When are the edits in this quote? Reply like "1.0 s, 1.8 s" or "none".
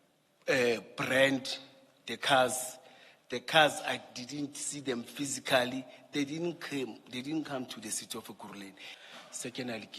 8.9 s